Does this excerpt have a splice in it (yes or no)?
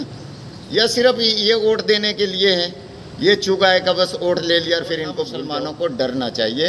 yes